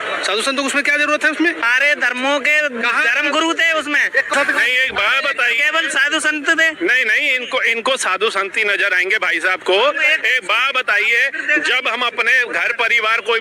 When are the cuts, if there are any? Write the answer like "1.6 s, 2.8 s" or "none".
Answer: 1.6 s, 4.3 s